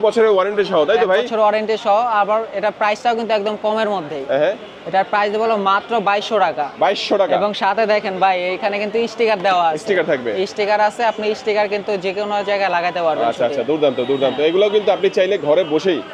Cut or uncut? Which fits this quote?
uncut